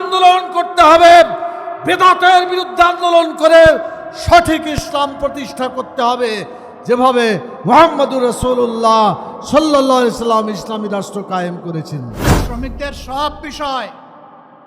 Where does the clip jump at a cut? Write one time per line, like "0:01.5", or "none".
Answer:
0:12.5